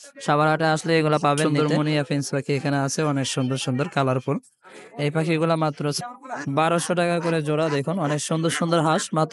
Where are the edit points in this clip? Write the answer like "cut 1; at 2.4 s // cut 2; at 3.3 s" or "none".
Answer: cut 1; at 1.4 s // cut 2; at 6.0 s